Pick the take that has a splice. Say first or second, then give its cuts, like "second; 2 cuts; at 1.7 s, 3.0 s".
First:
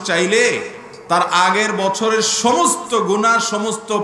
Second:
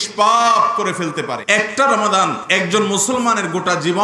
second; 2 cuts; at 1.4 s, 2.4 s